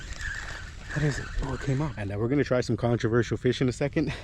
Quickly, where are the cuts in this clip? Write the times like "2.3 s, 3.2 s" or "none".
2.0 s